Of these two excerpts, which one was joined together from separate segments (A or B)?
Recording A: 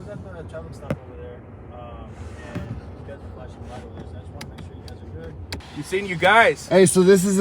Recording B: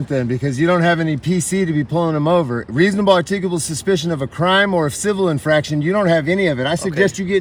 A